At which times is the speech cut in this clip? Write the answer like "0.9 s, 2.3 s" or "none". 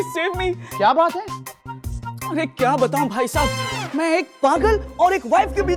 none